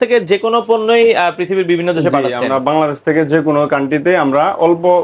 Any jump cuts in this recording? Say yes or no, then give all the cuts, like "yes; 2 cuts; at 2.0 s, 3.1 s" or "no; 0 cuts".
no; 0 cuts